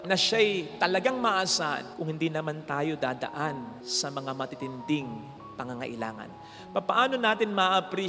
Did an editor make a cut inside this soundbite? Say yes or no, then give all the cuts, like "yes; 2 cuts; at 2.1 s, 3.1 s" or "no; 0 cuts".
no; 0 cuts